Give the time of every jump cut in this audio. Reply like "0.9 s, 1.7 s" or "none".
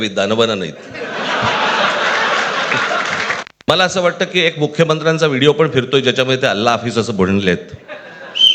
3.6 s